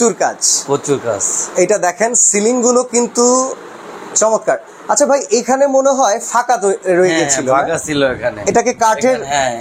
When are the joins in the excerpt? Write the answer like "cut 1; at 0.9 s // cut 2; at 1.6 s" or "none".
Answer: none